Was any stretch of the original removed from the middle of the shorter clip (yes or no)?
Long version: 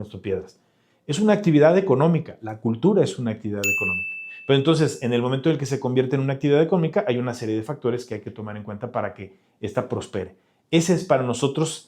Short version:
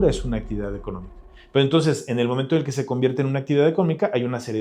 no